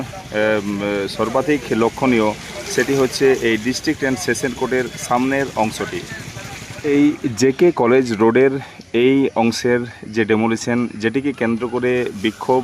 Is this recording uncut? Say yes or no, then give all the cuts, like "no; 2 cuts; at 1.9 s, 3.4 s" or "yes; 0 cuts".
no; 1 cut; at 6.8 s